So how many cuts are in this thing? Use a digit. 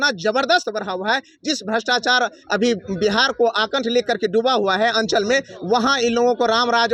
0